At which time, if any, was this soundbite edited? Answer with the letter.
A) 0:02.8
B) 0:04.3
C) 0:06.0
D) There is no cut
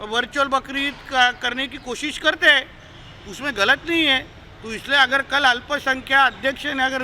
D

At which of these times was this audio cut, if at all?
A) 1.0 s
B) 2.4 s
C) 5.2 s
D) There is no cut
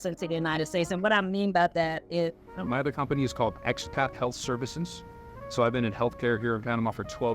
B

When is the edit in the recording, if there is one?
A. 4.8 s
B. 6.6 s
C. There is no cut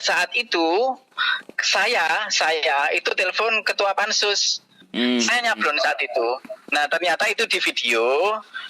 A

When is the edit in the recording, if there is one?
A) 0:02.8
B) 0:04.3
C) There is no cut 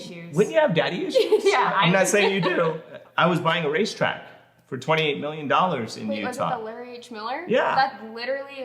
A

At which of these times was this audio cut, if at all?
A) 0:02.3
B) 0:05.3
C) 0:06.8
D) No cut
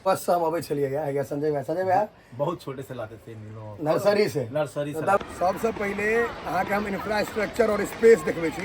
B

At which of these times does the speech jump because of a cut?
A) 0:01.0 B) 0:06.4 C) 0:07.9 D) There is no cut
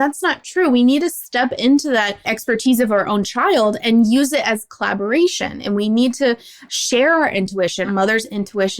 C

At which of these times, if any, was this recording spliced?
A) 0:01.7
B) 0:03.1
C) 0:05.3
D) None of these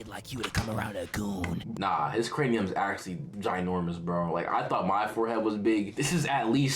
A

